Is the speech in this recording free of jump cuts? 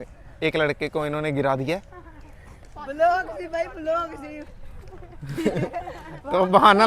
yes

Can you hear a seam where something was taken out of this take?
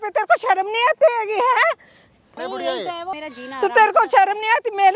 yes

